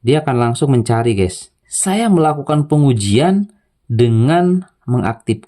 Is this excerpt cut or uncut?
cut